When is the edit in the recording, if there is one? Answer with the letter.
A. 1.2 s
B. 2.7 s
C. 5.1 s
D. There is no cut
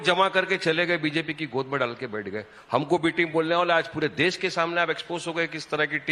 D